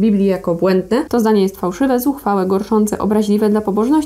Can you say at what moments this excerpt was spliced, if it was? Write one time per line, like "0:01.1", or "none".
0:01.1